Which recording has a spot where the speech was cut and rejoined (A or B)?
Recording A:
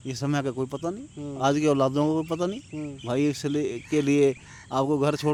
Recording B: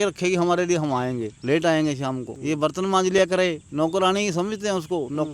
B